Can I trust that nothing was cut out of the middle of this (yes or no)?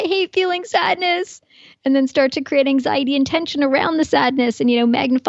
yes